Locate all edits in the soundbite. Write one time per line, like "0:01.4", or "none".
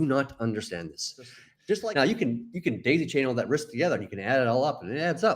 0:01.5